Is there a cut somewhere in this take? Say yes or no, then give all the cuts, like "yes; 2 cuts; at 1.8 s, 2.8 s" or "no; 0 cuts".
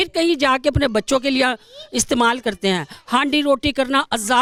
no; 0 cuts